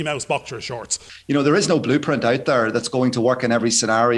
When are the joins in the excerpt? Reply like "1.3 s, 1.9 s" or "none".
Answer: 1.1 s

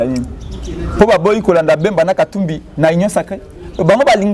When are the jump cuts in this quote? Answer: none

